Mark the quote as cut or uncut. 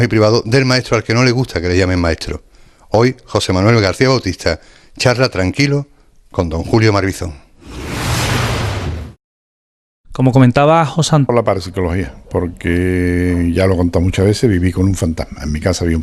uncut